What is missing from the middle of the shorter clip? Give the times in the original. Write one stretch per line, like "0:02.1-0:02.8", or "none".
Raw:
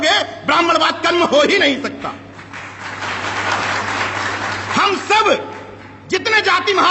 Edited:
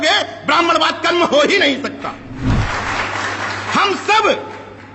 0:02.6-0:03.6